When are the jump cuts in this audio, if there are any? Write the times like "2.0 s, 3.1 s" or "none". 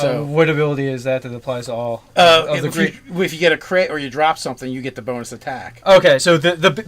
3.4 s